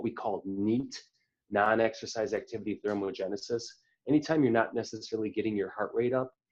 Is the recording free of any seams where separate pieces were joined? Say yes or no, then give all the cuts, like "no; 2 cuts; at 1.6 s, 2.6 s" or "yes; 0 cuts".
yes; 0 cuts